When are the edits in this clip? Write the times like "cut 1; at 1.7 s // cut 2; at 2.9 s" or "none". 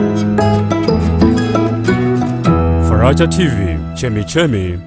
cut 1; at 2.3 s

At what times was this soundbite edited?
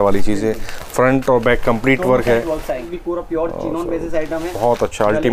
cut 1; at 2.9 s

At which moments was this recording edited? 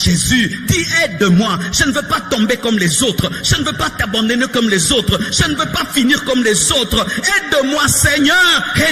none

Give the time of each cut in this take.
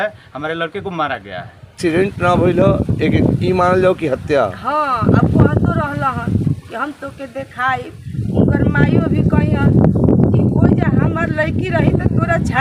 cut 1; at 1.8 s

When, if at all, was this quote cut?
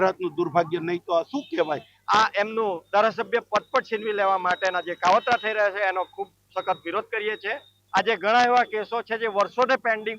cut 1; at 1.9 s // cut 2; at 7.8 s

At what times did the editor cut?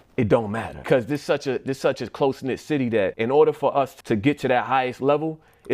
cut 1; at 0.8 s // cut 2; at 3.1 s // cut 3; at 3.9 s

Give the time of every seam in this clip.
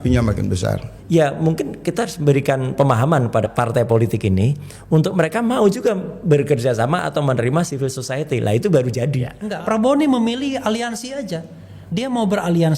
cut 1; at 0.9 s // cut 2; at 9.4 s

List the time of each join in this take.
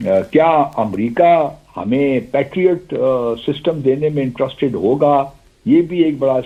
none

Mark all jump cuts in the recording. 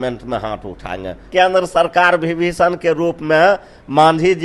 cut 1; at 1.3 s

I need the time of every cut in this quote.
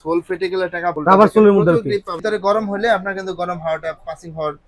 cut 1; at 2.2 s

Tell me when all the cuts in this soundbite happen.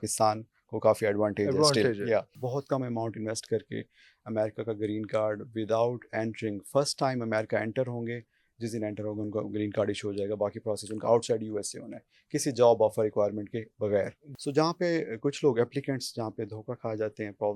cut 1; at 2.4 s // cut 2; at 14.2 s

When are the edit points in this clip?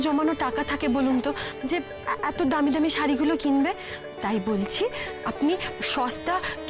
none

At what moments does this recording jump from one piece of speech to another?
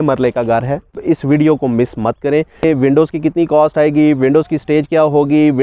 cut 1; at 1.0 s // cut 2; at 2.6 s

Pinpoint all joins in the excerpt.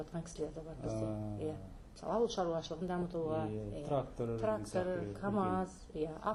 none

